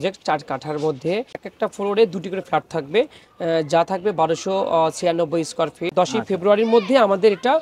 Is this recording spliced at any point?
yes; 2 cuts; at 1.5 s, 5.8 s

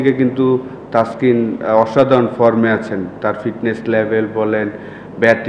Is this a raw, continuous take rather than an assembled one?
yes; 0 cuts

